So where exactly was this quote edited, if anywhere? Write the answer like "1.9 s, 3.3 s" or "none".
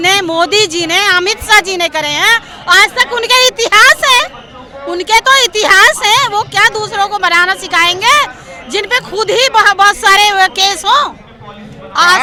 none